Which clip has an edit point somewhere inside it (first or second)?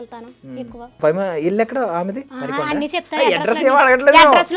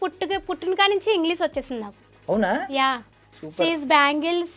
first